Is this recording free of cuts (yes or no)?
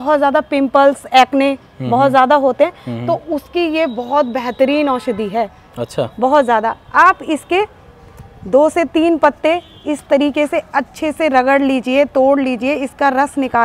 yes